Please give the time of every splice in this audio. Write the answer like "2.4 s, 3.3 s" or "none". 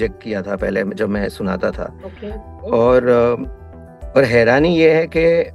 none

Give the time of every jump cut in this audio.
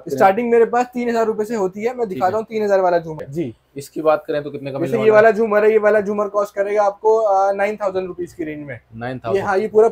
3.2 s

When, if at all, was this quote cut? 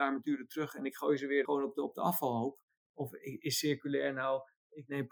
1.5 s

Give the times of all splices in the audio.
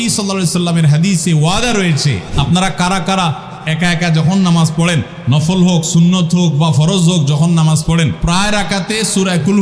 2.2 s, 5.1 s, 8.2 s

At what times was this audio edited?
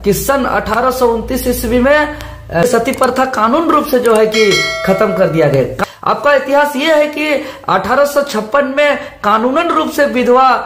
2.6 s, 5.8 s

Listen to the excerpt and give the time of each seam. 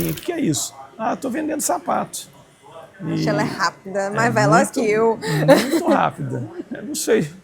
none

